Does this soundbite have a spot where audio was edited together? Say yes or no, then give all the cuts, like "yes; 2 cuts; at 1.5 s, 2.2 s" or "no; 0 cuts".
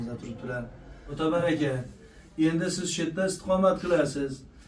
yes; 1 cut; at 1.0 s